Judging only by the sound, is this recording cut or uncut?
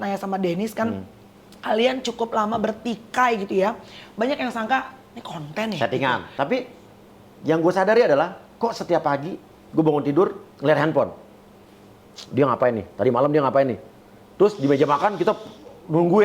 cut